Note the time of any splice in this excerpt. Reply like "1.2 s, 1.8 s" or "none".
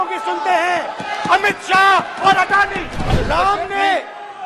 3.1 s